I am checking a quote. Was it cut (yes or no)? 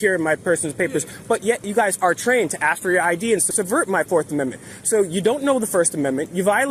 yes